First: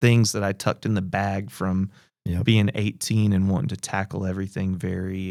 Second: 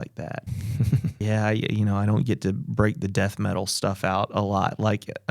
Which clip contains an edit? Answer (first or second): second